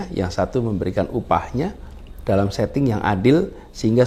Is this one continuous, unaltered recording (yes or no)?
yes